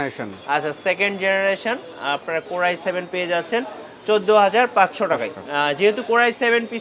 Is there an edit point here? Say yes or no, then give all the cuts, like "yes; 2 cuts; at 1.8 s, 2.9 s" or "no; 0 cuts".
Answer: yes; 1 cut; at 5.4 s